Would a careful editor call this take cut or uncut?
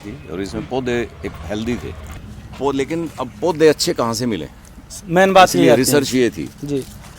cut